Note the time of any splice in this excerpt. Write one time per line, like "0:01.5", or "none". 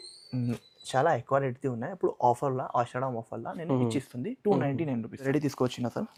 none